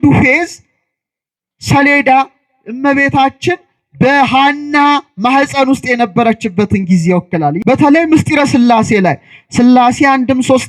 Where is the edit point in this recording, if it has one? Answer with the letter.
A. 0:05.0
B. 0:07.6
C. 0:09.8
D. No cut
B